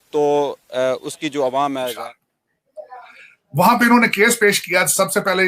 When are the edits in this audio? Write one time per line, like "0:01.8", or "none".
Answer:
0:02.0